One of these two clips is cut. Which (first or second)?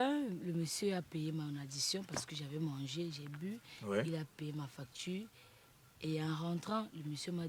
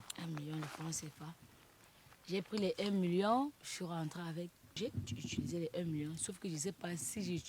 second